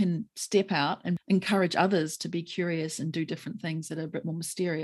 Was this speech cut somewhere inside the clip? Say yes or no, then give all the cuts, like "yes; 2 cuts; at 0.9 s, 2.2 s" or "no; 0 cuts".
yes; 1 cut; at 1.2 s